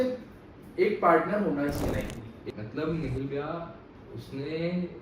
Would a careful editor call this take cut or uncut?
cut